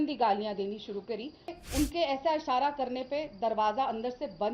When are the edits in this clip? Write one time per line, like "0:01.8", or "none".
0:01.5